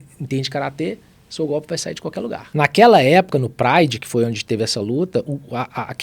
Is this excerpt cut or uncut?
cut